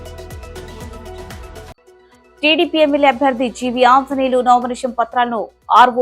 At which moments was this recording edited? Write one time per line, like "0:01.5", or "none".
0:01.3